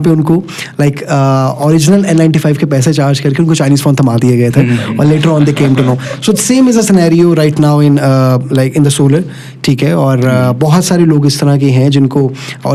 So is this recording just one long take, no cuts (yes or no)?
yes